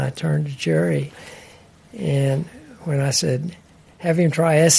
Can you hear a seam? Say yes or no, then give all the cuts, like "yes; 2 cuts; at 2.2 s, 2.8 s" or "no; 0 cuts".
yes; 1 cut; at 1.1 s